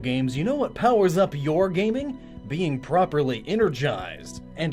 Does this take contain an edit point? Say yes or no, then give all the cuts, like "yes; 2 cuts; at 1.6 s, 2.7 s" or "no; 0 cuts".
yes; 1 cut; at 1.3 s